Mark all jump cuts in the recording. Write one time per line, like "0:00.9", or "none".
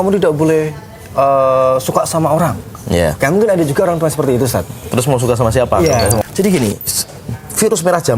0:06.2